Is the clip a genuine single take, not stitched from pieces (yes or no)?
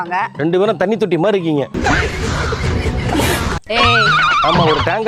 yes